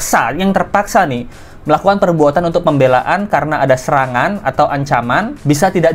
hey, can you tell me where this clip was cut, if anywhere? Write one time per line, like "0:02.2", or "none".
none